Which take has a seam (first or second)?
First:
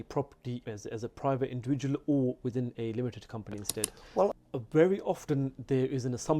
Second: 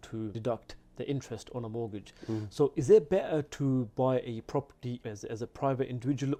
first